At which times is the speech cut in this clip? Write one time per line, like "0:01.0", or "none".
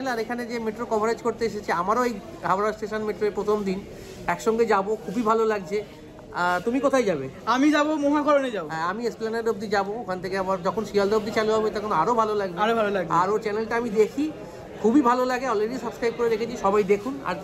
none